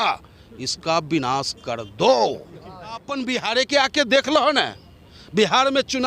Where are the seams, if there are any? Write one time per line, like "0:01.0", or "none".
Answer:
0:03.0

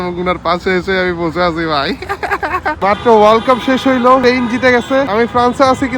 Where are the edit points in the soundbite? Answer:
0:02.8
0:04.2
0:05.1

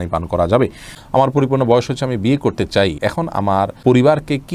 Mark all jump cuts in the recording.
0:00.9
0:03.5

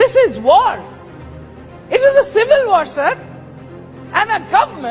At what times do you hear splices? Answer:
none

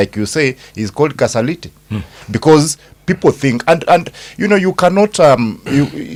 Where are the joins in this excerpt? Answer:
none

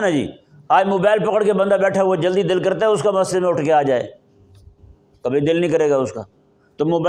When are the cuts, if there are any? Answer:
none

